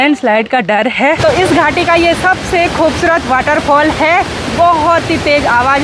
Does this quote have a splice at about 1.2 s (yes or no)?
yes